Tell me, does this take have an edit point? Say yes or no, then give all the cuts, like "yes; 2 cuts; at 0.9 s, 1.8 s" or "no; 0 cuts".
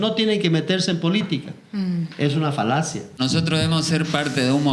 yes; 1 cut; at 3.2 s